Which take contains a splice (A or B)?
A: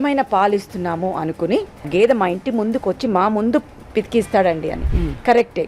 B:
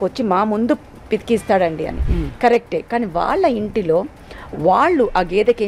A